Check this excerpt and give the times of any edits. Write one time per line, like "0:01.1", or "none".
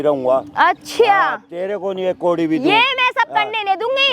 none

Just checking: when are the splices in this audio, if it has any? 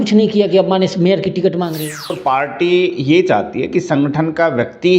0:02.2

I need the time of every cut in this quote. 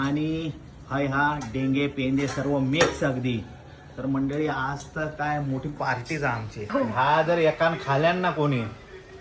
0:06.7

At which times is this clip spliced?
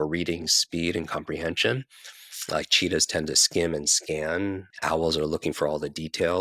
0:04.7

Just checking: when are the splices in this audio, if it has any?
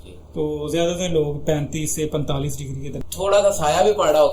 0:03.0

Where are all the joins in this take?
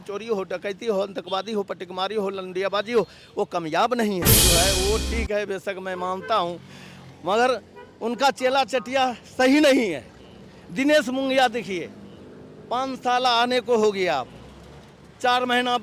0:04.4

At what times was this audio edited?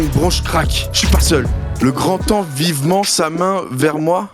0:01.6

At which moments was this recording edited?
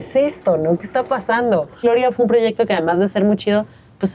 0:01.8

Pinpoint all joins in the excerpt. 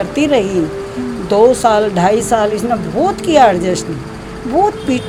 none

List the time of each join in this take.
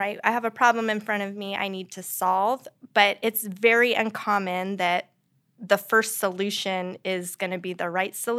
none

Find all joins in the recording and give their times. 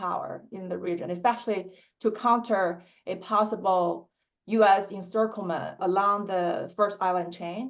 0:05.8

